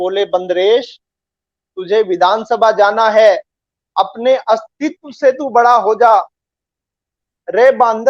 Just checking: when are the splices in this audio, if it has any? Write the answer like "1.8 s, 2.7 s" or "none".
7.2 s